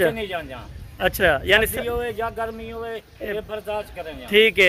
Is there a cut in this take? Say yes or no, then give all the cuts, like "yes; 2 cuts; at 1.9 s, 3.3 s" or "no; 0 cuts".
no; 0 cuts